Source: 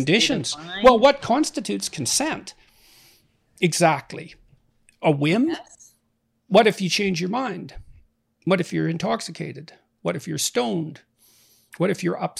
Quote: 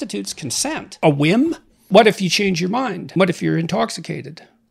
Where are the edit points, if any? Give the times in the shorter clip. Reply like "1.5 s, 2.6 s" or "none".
0.9 s, 1.7 s, 3.0 s